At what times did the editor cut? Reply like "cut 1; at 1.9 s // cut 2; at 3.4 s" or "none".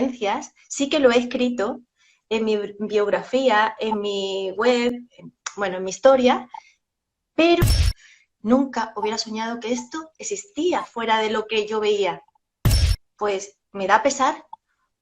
cut 1; at 7.7 s // cut 2; at 12.6 s